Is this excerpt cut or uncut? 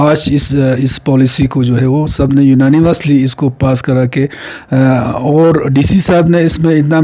uncut